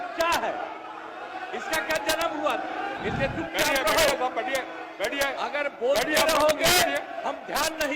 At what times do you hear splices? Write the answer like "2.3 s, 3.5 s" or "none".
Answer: 3.0 s

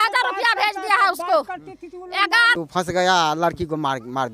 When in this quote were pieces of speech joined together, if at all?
2.5 s

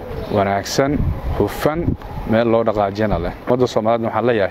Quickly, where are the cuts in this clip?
3.5 s

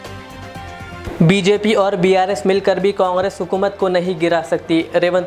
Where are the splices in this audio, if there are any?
none

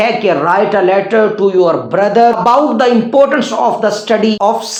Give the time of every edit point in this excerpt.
none

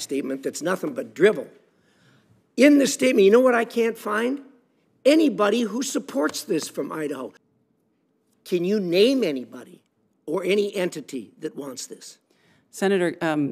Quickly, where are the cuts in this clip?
7.5 s

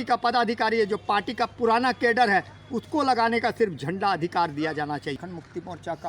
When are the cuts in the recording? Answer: 5.2 s

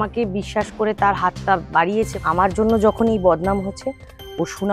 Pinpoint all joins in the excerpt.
2.1 s

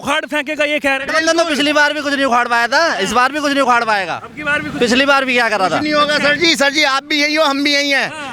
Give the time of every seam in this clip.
none

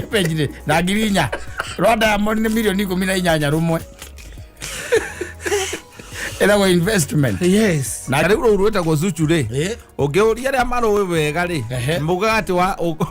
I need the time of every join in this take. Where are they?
8.2 s

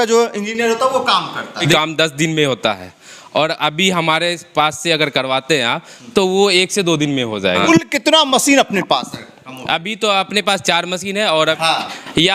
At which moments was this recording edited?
1.7 s, 7.6 s, 11.6 s

